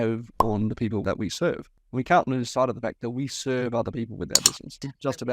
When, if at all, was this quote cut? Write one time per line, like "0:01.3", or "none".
0:01.0